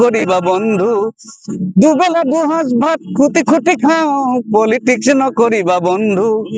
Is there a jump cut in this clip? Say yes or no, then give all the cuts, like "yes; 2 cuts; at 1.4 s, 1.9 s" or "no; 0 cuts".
no; 0 cuts